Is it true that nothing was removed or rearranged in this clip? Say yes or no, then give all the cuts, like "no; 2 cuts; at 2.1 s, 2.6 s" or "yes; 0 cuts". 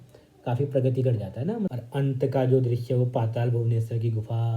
no; 1 cut; at 1.7 s